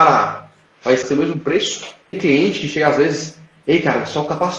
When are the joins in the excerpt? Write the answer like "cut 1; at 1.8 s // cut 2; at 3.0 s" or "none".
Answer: cut 1; at 1.1 s // cut 2; at 2.2 s